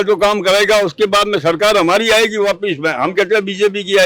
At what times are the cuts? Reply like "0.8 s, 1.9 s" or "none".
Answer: none